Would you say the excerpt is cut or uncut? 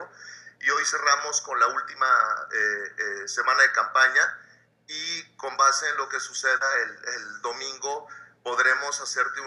uncut